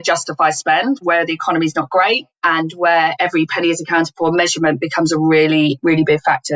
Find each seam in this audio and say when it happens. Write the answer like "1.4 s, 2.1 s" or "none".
1.0 s, 3.1 s